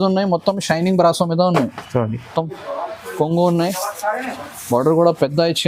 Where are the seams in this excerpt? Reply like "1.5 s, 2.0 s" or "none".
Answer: 2.2 s